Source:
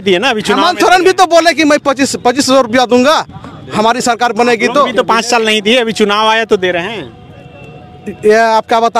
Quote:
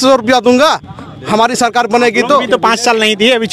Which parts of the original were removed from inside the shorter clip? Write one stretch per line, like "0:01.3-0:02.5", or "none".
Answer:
none